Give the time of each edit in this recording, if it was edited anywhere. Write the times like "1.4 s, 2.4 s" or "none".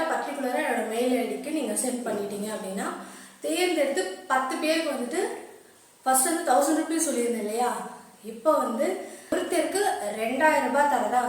9.3 s